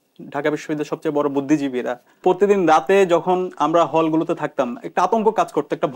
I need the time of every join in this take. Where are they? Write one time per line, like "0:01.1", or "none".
0:02.2